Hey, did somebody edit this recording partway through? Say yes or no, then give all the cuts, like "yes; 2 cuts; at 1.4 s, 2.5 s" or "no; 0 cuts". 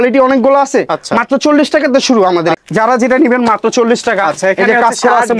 yes; 1 cut; at 2.6 s